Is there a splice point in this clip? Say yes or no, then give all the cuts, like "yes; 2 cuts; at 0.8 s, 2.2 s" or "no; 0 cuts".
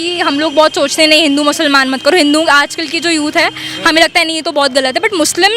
no; 0 cuts